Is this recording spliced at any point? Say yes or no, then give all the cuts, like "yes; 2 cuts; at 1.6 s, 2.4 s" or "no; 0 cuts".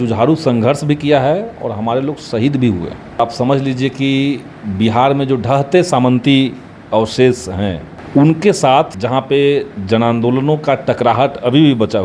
yes; 3 cuts; at 3.2 s, 7.9 s, 9.0 s